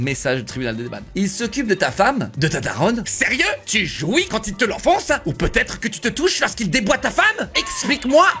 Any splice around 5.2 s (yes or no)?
no